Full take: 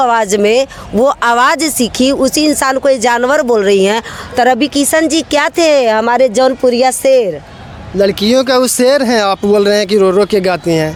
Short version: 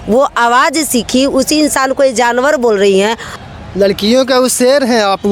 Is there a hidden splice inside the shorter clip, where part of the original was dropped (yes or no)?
yes